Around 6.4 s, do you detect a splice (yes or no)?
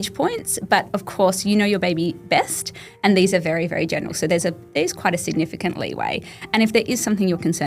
no